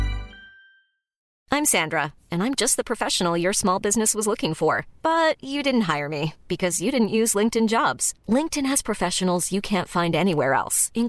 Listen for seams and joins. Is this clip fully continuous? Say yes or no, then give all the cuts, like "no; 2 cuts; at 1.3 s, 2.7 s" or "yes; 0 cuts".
no; 1 cut; at 1.3 s